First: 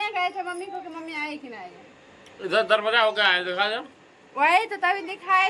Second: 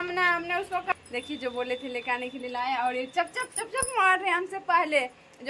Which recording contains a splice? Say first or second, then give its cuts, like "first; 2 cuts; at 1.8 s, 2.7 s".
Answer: second; 1 cut; at 0.9 s